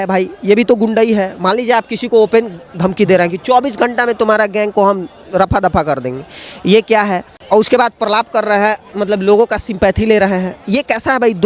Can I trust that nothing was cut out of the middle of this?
no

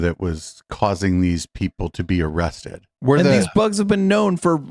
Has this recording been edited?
yes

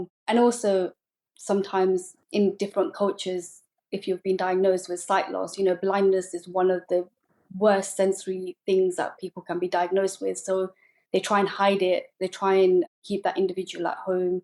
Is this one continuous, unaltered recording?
yes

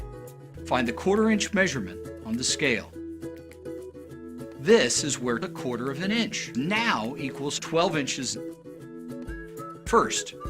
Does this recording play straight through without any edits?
no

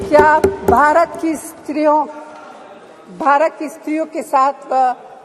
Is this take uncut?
yes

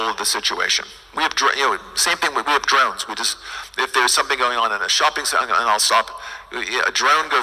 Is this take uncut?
yes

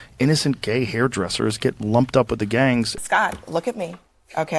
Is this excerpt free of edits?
no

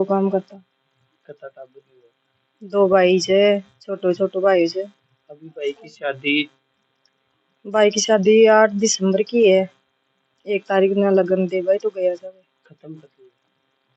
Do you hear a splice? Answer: no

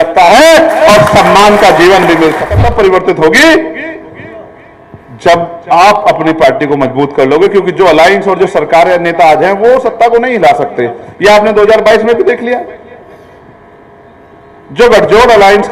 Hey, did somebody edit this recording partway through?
yes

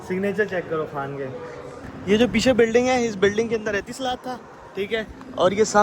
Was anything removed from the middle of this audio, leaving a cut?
yes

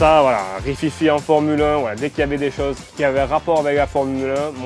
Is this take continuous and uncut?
yes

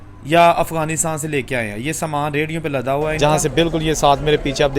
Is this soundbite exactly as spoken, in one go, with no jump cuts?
no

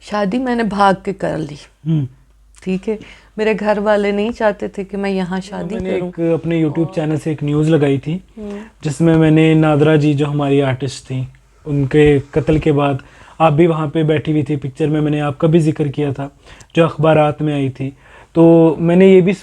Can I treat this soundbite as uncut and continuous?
no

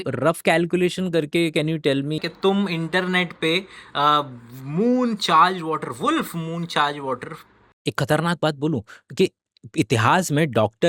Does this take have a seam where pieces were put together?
yes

